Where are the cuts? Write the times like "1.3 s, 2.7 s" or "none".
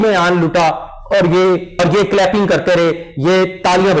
1.8 s